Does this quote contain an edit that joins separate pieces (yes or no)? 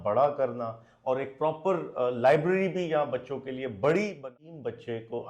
yes